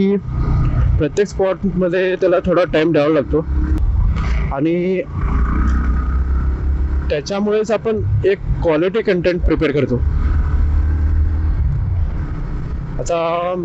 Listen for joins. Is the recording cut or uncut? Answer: uncut